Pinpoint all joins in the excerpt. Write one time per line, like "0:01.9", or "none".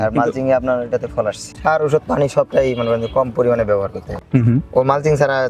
0:01.5
0:04.0